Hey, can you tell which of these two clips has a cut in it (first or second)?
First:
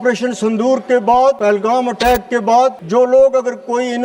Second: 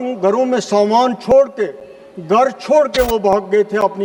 first